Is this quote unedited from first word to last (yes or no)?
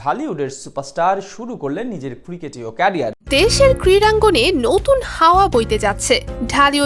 no